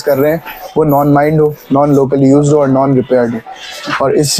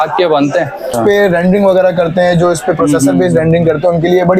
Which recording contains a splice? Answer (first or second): second